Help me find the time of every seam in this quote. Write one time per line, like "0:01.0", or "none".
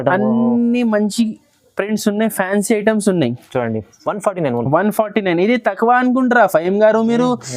none